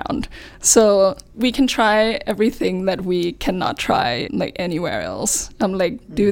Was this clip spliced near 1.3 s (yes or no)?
yes